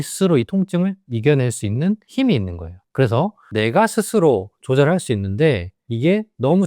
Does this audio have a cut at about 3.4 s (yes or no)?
yes